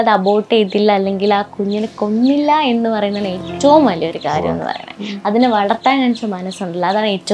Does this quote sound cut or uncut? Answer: uncut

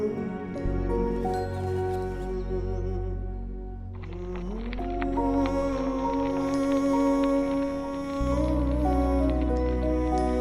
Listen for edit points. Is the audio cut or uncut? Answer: uncut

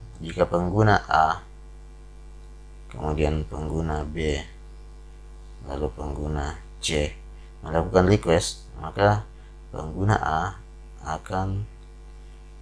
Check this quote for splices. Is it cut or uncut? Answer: uncut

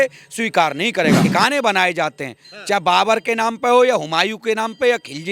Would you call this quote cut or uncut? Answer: cut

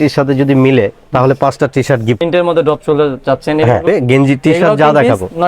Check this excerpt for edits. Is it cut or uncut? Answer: cut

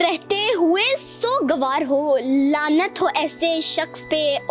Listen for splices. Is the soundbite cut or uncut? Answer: uncut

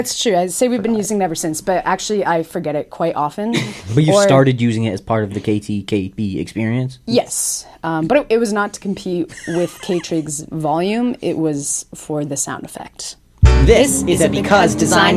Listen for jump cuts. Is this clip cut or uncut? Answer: cut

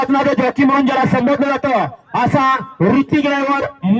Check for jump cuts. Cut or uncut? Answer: uncut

